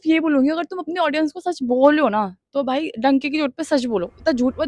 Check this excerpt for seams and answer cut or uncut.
uncut